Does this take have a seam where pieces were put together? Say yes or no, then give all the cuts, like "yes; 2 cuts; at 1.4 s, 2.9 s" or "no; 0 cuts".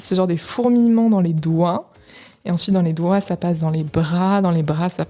no; 0 cuts